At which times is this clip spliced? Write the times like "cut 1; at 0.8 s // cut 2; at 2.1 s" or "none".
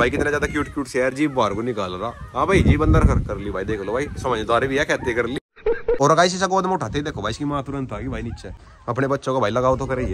none